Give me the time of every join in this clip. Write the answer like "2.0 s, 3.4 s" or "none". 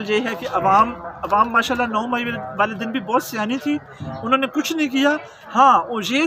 none